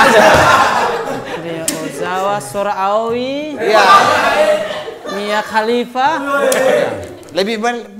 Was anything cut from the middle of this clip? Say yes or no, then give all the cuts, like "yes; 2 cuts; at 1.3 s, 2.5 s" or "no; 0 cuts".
no; 0 cuts